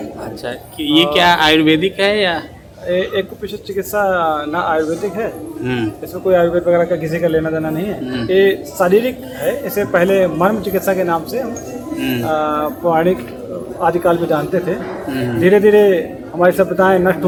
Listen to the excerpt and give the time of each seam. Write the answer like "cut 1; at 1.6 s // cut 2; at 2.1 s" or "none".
none